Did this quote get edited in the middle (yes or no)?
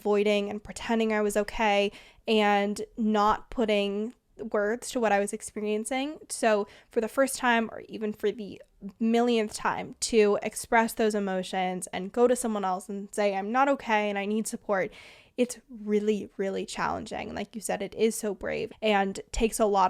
yes